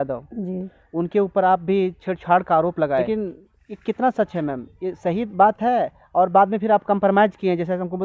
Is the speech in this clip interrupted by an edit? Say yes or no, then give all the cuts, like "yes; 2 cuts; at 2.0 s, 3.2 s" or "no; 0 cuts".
yes; 1 cut; at 3.1 s